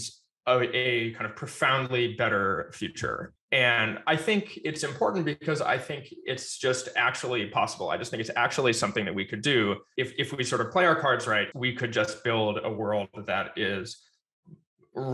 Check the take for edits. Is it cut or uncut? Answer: cut